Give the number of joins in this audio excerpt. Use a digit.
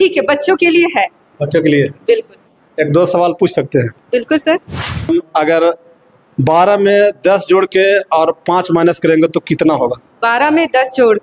1